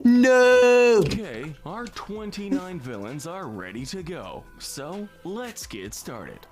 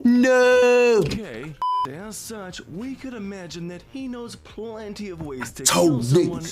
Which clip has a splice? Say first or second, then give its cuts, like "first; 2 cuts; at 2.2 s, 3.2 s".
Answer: second; 1 cut; at 1.8 s